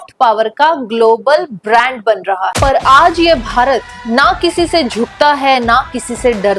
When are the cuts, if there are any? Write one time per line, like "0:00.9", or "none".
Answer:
0:02.5